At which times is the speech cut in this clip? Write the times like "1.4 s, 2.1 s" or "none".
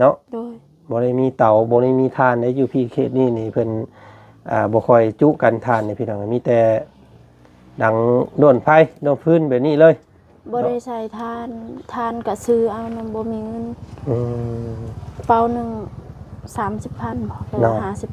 none